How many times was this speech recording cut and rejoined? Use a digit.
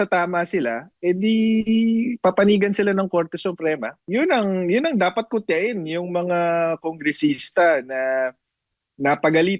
1